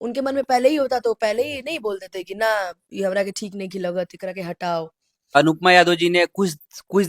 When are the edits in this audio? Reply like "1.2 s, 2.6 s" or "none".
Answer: 5.4 s